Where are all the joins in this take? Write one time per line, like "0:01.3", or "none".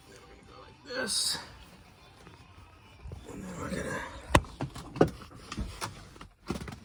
none